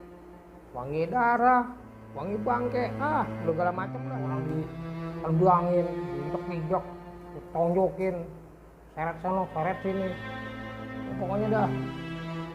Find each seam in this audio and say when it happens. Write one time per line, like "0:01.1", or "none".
0:03.9